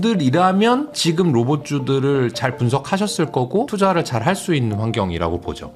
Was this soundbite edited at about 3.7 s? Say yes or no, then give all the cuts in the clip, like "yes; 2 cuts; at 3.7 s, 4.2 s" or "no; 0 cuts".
yes; 2 cuts; at 0.9 s, 3.7 s